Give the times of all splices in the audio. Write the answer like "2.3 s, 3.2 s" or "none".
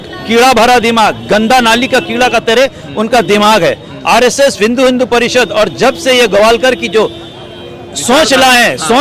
none

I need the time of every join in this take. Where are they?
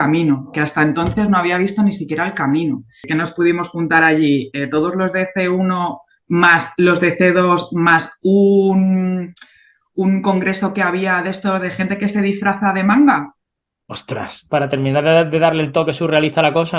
3.0 s

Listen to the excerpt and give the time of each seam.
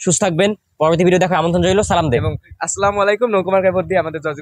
none

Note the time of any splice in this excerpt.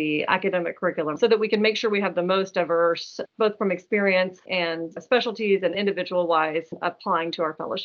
1.1 s, 6.7 s

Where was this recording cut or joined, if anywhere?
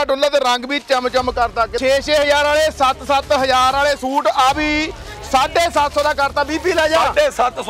1.7 s

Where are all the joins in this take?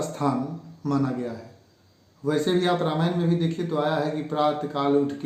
none

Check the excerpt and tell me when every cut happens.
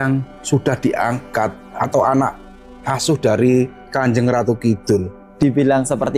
5.2 s

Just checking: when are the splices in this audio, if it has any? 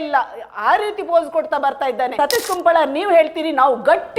2.2 s

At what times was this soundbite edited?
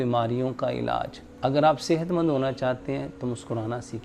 1.2 s

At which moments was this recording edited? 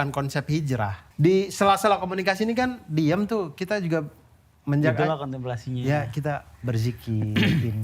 1.0 s

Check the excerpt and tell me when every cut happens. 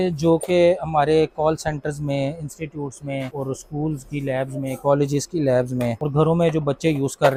none

